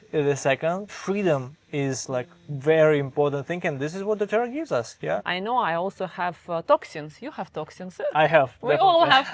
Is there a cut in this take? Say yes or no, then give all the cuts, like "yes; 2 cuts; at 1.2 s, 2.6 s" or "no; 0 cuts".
yes; 2 cuts; at 0.9 s, 5.2 s